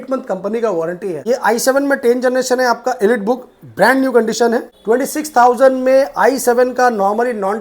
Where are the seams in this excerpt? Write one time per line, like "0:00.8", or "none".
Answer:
0:01.2
0:04.7